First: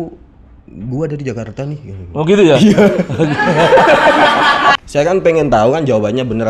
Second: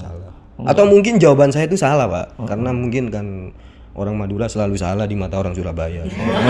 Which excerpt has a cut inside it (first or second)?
first